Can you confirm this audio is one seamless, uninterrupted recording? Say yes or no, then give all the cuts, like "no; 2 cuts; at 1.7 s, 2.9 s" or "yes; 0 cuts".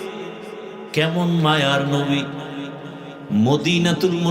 no; 1 cut; at 3.1 s